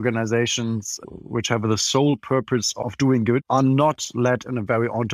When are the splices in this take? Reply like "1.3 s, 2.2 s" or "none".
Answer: 1.3 s, 3.4 s

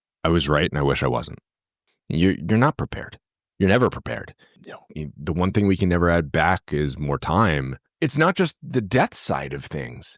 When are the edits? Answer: 4.5 s, 7.8 s

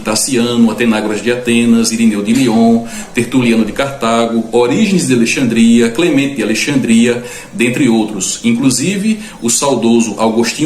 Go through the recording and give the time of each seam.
3.7 s

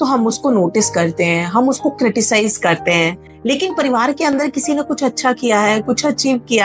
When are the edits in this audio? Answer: none

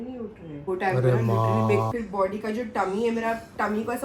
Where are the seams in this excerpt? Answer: 1.9 s

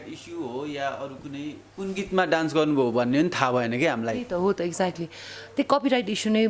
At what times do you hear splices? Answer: none

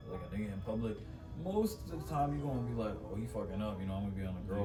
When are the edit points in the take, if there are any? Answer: none

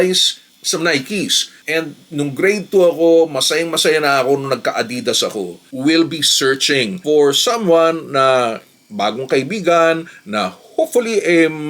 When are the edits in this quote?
1.5 s, 5.7 s

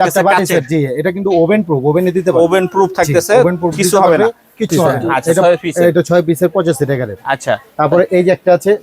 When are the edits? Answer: 5.1 s

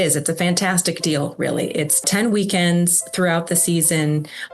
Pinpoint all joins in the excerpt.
2.1 s

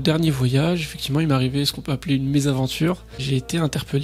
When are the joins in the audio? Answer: 3.1 s

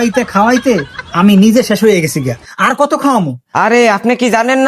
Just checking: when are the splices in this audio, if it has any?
3.4 s

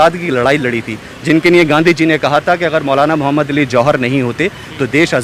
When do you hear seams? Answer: none

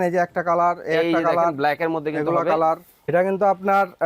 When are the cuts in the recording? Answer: 2.9 s

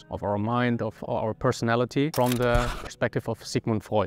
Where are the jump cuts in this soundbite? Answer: none

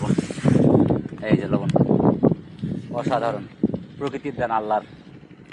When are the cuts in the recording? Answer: none

